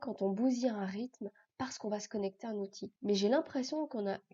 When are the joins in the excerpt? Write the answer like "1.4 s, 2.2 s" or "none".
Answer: 2.9 s